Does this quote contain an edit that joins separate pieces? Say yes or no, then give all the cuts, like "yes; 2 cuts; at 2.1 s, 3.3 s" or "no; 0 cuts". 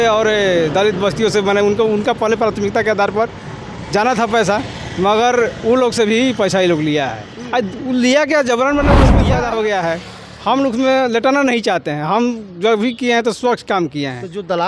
yes; 1 cut; at 9.2 s